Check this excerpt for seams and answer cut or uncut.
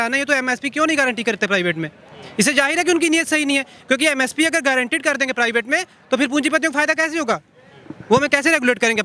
uncut